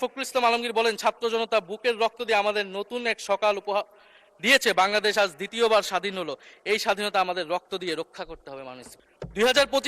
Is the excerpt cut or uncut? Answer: cut